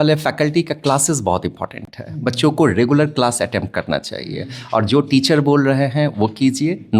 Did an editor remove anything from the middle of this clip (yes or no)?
no